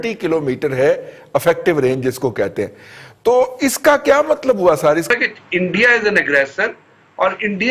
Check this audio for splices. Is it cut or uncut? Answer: cut